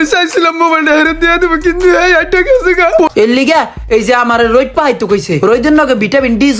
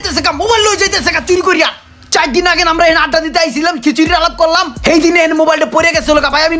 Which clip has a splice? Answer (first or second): first